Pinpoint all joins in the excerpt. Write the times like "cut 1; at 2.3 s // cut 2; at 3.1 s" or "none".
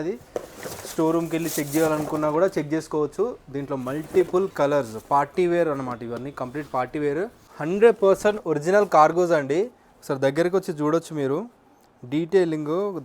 cut 1; at 7.5 s